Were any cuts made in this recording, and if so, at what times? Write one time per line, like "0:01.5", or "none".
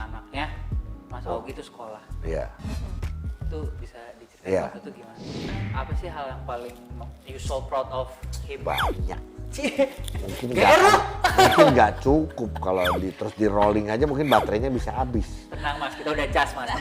0:05.5